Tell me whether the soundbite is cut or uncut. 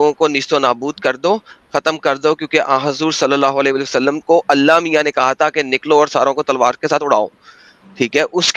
uncut